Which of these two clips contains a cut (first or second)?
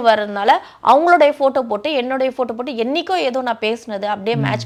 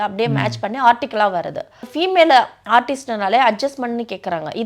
second